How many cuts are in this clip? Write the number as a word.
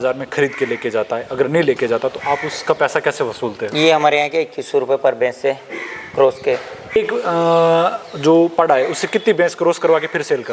one